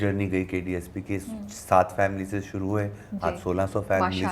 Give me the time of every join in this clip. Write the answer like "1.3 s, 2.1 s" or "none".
none